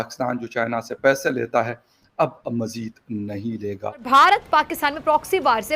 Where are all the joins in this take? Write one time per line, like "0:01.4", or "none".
0:04.0